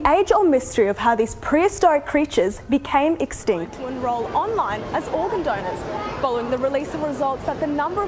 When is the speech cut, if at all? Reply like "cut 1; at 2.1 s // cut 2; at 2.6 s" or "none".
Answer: cut 1; at 3.7 s